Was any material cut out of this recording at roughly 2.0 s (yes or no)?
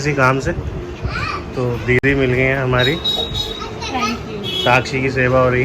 no